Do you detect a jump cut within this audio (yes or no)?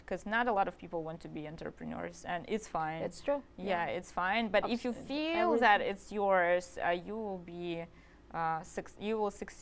no